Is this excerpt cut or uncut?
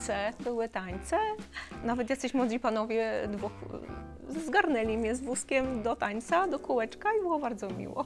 uncut